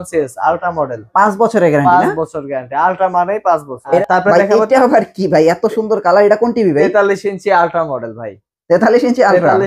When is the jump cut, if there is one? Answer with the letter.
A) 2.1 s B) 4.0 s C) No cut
B